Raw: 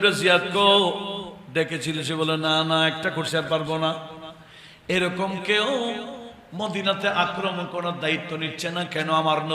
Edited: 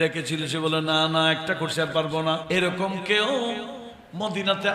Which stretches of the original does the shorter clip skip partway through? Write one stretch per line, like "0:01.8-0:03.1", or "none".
0:04.0-0:04.8